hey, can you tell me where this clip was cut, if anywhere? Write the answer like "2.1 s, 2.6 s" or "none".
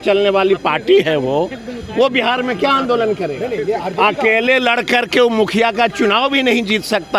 none